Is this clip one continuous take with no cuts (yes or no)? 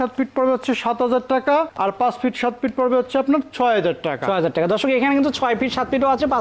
yes